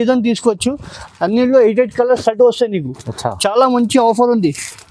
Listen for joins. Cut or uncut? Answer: uncut